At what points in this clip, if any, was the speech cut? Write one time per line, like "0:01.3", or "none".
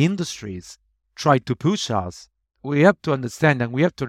0:02.7